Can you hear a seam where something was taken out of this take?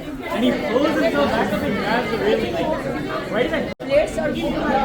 yes; 1 cut; at 3.8 s

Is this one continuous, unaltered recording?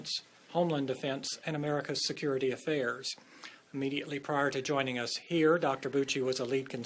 no; 1 cut; at 1.8 s

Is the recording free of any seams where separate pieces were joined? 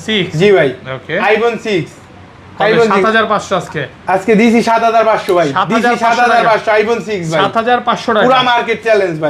yes; 0 cuts

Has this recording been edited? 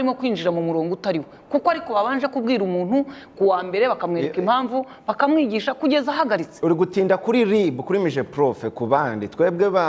no; 0 cuts

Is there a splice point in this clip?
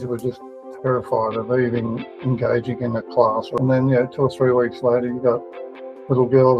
yes; 1 cut; at 3.5 s

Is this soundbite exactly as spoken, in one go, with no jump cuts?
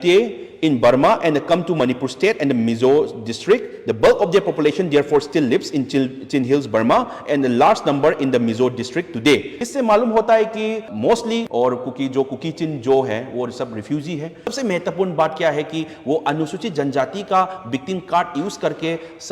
no; 1 cut; at 14.5 s

